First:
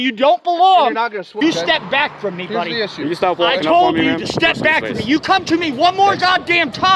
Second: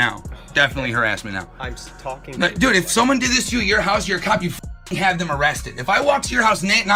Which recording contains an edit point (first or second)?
first